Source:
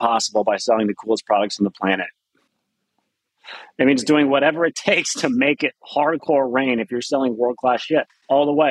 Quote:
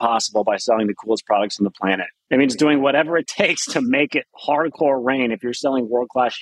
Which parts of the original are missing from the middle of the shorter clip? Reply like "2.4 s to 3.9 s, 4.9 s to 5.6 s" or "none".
2.1 s to 3.6 s